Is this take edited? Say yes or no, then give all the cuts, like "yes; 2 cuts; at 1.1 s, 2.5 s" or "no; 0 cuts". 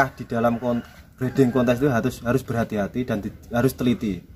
no; 0 cuts